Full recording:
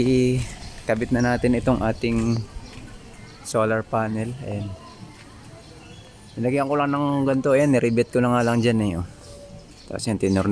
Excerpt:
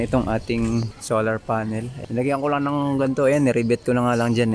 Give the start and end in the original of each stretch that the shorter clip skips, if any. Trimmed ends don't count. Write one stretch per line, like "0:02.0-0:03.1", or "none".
0:02.5-0:03.4
0:04.4-0:06.2